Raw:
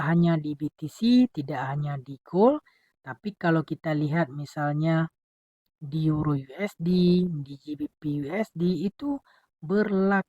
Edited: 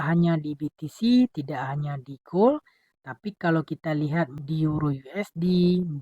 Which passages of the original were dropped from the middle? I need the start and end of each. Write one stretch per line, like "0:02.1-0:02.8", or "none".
0:04.4-0:05.8

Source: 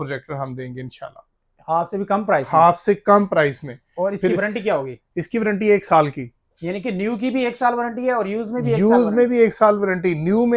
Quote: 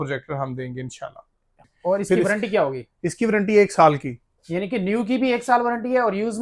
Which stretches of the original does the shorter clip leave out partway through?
0:01.5-0:03.7

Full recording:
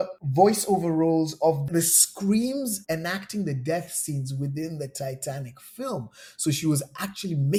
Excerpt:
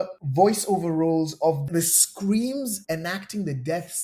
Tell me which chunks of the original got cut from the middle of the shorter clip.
none

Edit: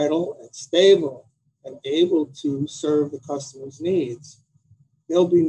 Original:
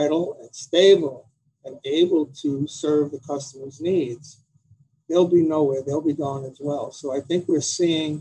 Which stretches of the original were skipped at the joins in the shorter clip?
none

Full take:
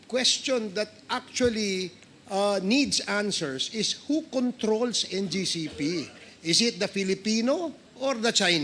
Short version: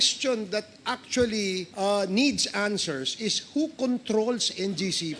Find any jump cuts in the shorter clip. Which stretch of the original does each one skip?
0:01.9-0:02.2

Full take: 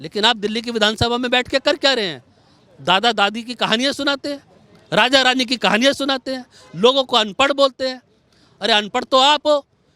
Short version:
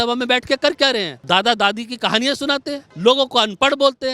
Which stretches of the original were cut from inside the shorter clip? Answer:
0:02.2-0:02.7
0:04.4-0:06.6

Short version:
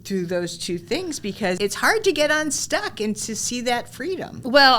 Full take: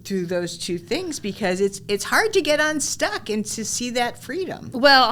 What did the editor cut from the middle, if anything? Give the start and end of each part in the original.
0:01.6-0:01.9

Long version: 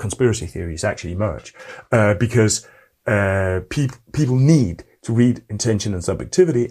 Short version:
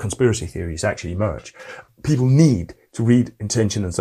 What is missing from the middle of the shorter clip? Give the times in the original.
0:01.8-0:03.9

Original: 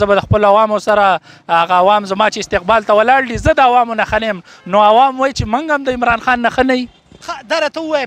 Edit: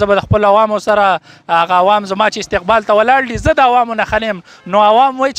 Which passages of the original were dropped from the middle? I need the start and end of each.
none

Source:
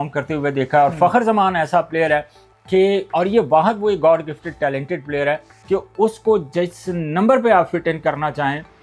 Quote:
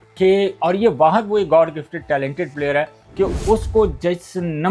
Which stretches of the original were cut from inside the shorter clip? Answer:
none

